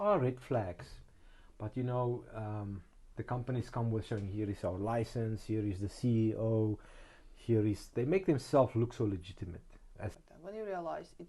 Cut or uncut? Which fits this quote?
cut